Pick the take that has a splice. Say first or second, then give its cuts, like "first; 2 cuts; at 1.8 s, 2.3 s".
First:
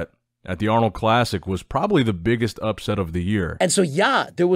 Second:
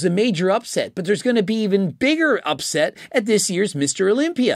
first; 1 cut; at 3.5 s